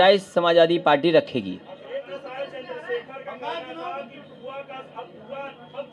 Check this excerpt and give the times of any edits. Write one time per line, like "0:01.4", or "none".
0:02.0